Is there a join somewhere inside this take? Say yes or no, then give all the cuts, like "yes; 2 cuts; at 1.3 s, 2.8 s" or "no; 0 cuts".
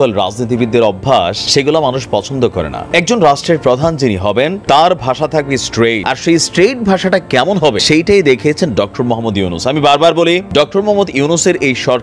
yes; 6 cuts; at 1.4 s, 2.8 s, 4.6 s, 6.0 s, 7.8 s, 10.5 s